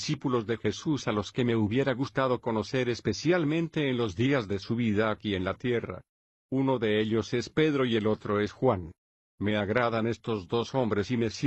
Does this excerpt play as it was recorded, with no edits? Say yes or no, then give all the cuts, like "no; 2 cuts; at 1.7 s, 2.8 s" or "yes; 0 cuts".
yes; 0 cuts